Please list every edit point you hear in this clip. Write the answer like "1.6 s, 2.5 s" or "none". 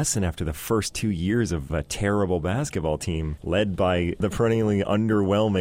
1.7 s, 3.3 s, 4.2 s